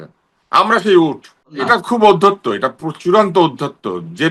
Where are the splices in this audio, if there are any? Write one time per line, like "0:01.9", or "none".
0:01.6